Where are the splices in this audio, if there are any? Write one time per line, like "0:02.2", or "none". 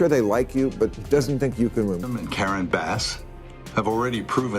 0:02.1